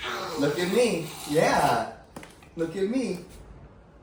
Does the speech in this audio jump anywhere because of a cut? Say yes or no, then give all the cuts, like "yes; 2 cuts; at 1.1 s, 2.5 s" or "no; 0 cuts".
no; 0 cuts